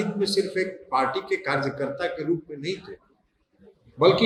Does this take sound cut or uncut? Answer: uncut